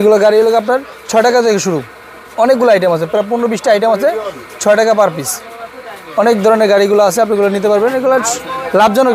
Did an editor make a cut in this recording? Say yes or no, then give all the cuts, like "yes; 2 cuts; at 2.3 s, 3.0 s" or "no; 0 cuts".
no; 0 cuts